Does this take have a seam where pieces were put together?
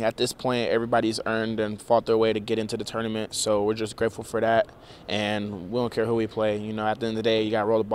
no; 0 cuts

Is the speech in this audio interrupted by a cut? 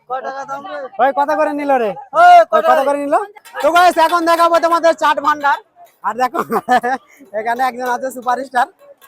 yes; 1 cut; at 3.4 s

